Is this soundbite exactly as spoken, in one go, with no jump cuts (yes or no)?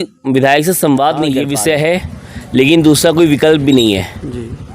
no